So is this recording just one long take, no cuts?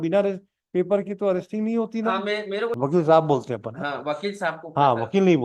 no; 1 cut; at 2.8 s

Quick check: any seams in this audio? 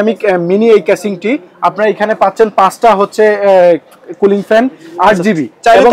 no; 0 cuts

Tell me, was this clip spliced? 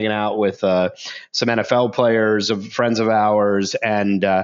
no; 0 cuts

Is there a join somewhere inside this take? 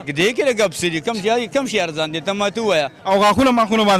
yes; 1 cut; at 3.0 s

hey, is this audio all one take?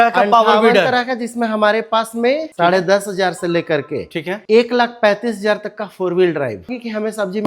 no; 2 cuts; at 2.5 s, 6.7 s

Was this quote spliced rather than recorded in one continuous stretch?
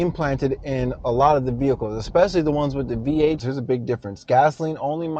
yes; 1 cut; at 3.4 s

